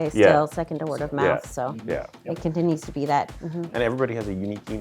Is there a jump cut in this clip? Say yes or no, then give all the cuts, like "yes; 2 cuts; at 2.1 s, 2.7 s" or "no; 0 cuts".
yes; 1 cut; at 3.4 s